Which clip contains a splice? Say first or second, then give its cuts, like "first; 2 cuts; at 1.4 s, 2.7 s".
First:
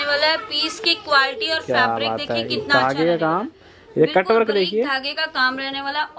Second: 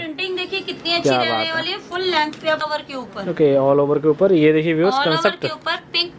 second; 1 cut; at 2.6 s